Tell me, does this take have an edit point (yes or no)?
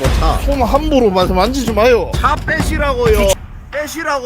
yes